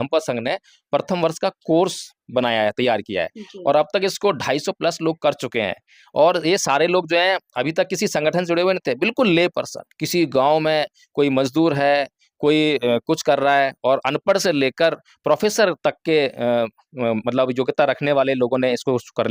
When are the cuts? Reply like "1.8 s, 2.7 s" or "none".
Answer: none